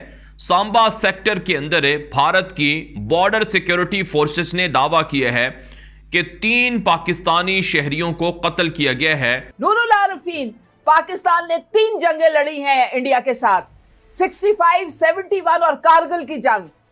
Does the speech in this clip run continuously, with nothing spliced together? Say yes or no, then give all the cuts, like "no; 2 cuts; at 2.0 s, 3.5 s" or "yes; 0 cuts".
no; 1 cut; at 9.5 s